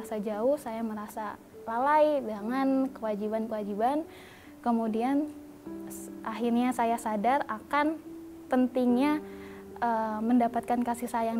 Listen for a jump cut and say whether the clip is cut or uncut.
uncut